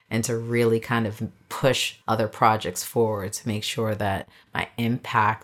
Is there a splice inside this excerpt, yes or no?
yes